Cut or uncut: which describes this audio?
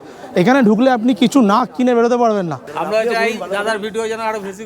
cut